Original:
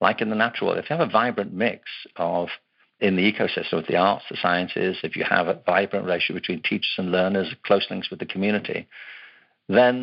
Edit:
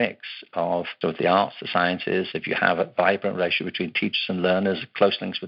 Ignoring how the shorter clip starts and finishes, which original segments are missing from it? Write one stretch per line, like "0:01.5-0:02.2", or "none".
0:02.6-0:03.6